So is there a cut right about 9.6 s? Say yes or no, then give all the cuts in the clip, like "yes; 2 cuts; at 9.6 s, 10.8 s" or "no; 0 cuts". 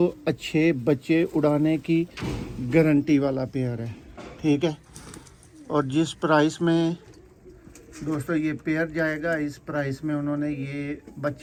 no; 0 cuts